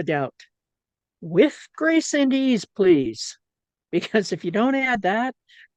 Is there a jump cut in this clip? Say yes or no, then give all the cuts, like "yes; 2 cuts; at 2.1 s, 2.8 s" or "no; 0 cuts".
no; 0 cuts